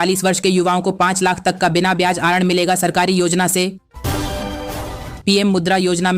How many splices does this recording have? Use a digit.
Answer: 2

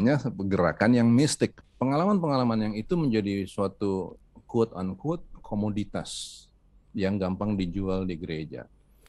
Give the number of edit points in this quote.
1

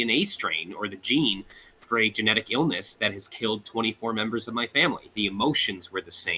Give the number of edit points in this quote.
1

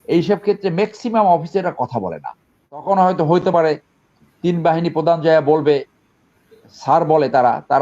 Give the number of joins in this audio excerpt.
1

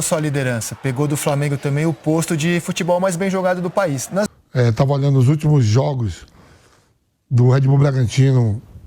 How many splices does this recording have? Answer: 1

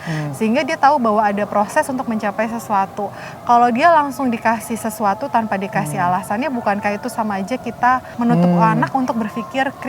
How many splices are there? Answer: 1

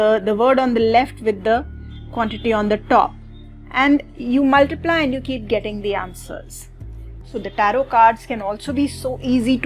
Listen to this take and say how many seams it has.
1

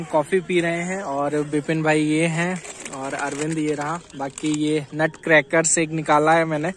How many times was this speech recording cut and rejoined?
0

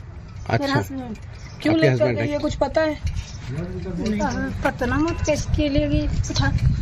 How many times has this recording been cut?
1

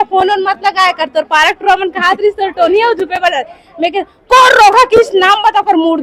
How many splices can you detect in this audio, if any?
0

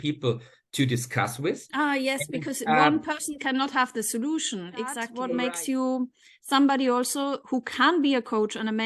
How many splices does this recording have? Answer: 1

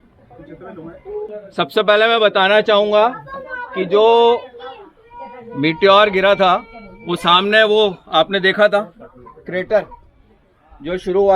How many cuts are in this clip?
1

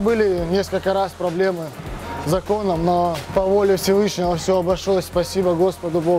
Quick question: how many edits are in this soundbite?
1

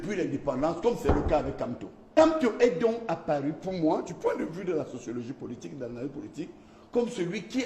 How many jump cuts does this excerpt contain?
1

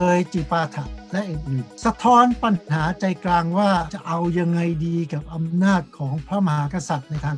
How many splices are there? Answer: 2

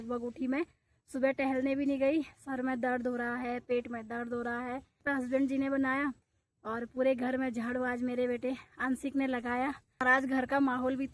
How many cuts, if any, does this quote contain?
2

